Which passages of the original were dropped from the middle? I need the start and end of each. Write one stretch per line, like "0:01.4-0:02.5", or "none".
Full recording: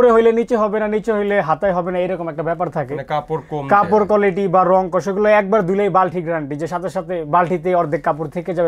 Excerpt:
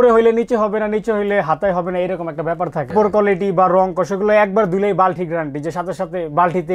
0:02.9-0:03.9